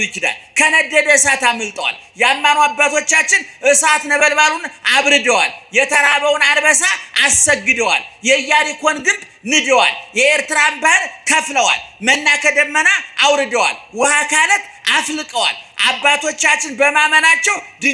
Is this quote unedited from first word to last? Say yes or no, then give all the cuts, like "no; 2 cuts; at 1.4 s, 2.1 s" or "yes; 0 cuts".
yes; 0 cuts